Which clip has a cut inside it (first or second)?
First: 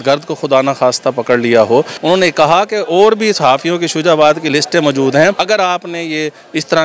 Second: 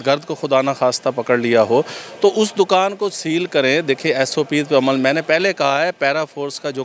first